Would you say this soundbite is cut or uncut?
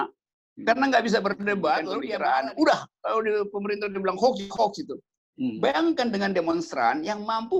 cut